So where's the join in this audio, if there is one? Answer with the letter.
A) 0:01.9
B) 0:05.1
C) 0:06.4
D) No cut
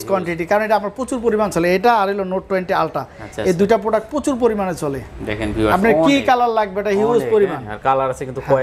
D